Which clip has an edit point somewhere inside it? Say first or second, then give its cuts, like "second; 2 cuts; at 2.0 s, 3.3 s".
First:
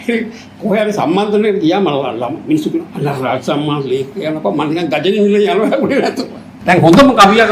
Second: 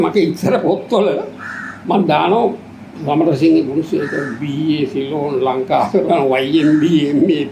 first; 1 cut; at 6.6 s